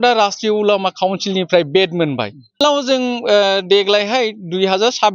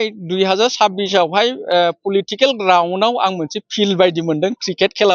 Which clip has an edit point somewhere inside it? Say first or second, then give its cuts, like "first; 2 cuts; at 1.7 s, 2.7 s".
first; 1 cut; at 2.6 s